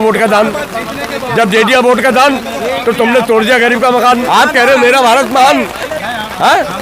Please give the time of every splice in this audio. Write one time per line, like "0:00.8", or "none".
0:04.2

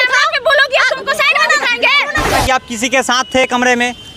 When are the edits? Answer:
0:02.3

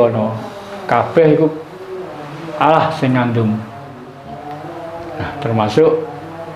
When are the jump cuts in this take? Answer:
0:04.1

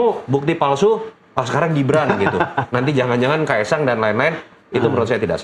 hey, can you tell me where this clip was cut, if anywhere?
none

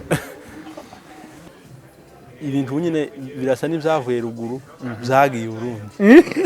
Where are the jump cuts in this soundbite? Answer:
0:01.4

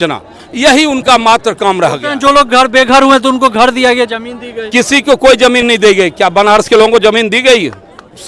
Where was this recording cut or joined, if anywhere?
none

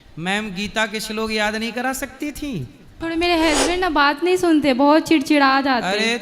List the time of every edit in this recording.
0:02.9

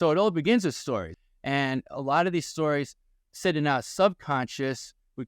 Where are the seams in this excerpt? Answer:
0:01.1

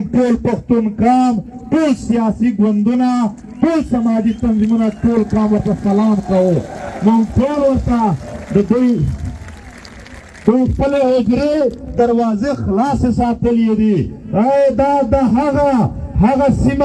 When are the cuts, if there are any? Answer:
none

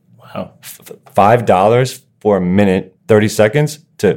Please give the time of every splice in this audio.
0:02.9

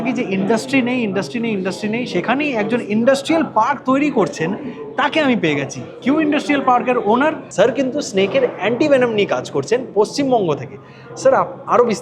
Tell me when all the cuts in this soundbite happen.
0:07.4

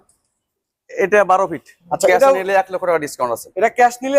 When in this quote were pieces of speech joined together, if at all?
0:01.7

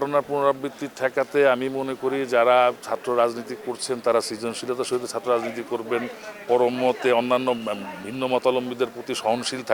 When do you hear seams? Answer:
none

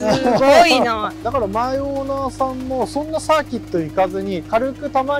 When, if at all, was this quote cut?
0:01.1

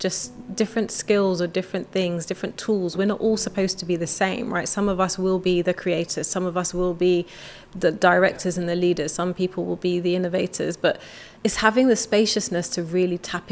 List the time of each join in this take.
none

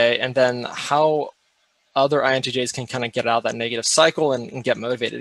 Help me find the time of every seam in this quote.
none

